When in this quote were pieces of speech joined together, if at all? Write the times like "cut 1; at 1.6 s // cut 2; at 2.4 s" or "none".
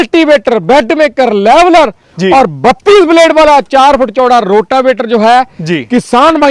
none